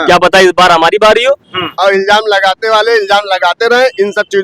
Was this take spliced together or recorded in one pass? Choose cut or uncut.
cut